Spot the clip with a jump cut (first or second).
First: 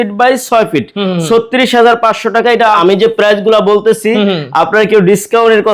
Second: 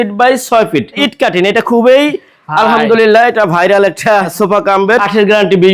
second